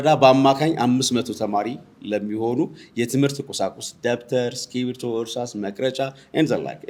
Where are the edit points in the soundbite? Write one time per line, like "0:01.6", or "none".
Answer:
none